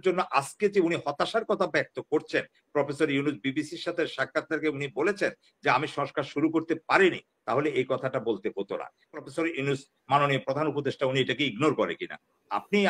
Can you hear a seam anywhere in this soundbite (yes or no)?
yes